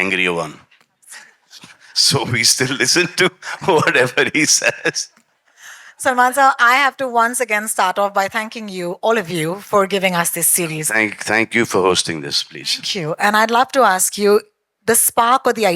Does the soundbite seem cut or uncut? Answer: uncut